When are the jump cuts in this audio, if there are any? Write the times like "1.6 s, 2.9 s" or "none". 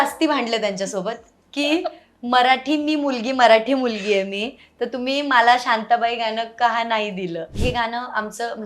7.6 s